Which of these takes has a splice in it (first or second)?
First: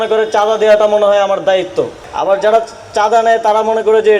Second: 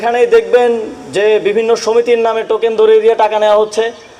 first